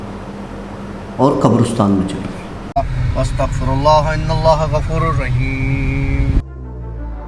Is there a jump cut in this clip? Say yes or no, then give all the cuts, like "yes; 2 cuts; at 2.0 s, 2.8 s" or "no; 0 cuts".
yes; 1 cut; at 2.7 s